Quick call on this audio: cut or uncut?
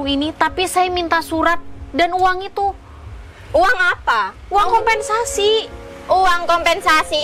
uncut